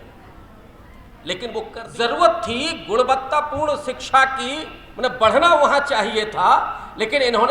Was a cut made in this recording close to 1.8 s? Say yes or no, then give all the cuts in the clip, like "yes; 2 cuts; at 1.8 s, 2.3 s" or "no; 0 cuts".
yes; 1 cut; at 1.8 s